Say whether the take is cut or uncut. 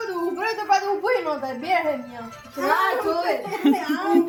uncut